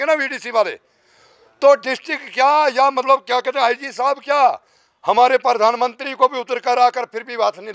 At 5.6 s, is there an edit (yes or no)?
no